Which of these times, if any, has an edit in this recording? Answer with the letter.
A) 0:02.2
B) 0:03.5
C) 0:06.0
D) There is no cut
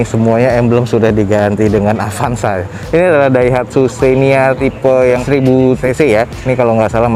D